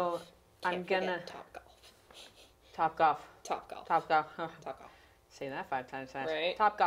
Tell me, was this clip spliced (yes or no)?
no